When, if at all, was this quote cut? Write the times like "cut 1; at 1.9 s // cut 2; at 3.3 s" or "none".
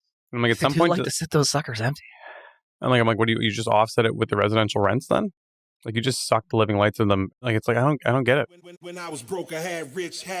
cut 1; at 7.4 s // cut 2; at 8.6 s